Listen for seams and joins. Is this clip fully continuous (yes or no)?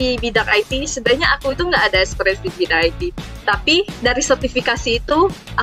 yes